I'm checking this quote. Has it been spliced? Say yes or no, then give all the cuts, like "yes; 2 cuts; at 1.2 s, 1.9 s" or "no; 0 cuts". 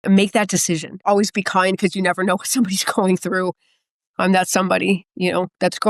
yes; 2 cuts; at 1.1 s, 4.1 s